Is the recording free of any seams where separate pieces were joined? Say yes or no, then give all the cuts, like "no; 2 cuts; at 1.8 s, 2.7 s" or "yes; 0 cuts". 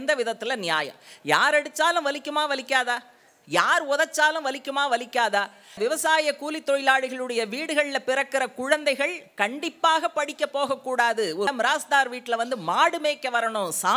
no; 2 cuts; at 5.8 s, 11.5 s